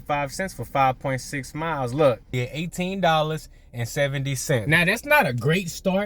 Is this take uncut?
no; 2 cuts; at 2.4 s, 4.6 s

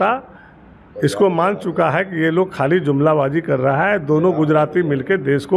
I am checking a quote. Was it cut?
no; 0 cuts

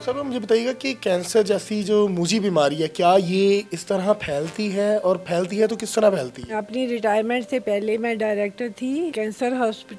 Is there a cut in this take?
yes; 2 cuts; at 6.5 s, 9.1 s

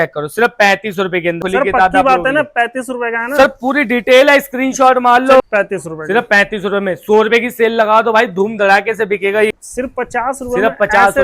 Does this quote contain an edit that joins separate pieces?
yes; 3 cuts; at 1.4 s, 5.4 s, 9.5 s

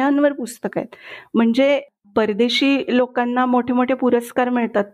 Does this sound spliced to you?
yes; 1 cut; at 1.9 s

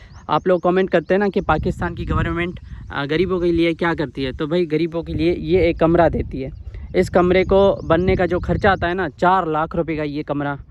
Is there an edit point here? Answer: no; 0 cuts

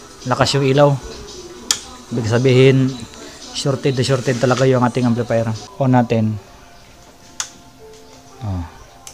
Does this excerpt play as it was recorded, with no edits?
no; 1 cut; at 5.6 s

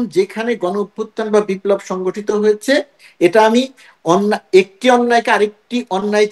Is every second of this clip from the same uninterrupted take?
yes; 0 cuts

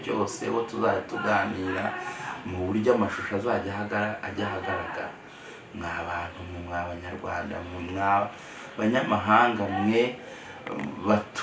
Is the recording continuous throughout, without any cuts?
yes; 0 cuts

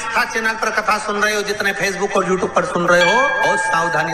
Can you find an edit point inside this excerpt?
no; 0 cuts

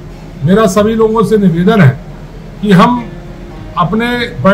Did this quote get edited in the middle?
no; 0 cuts

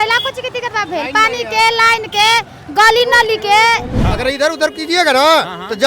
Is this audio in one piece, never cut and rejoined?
no; 1 cut; at 4.0 s

